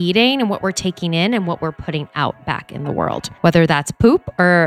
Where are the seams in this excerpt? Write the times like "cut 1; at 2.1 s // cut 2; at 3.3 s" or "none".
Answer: cut 1; at 3.3 s